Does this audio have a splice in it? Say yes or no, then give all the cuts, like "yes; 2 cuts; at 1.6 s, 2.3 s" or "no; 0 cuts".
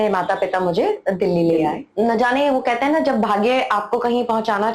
yes; 1 cut; at 1.8 s